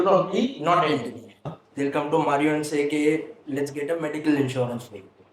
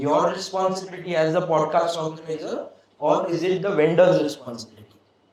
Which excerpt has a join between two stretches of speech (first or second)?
first